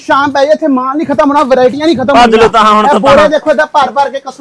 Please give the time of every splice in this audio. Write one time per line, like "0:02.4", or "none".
none